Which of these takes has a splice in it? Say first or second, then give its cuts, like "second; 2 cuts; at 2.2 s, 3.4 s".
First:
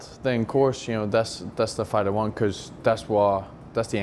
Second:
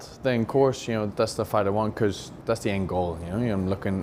second; 2 cuts; at 1.1 s, 2.3 s